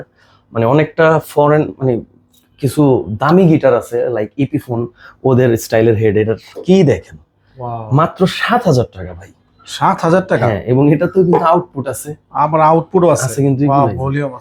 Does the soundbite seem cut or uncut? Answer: uncut